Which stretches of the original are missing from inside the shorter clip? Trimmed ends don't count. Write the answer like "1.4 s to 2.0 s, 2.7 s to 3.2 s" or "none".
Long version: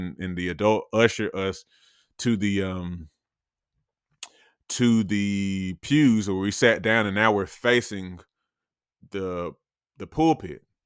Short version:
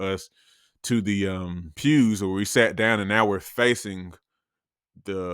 3.0 s to 5.7 s